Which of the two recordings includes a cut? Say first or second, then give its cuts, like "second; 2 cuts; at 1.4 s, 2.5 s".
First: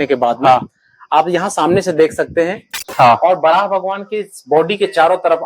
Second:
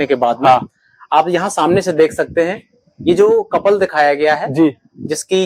first; 1 cut; at 2.8 s